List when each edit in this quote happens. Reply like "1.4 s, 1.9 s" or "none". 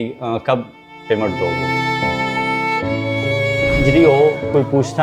3.8 s